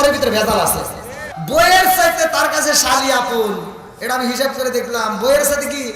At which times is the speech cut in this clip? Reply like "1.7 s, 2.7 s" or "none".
1.3 s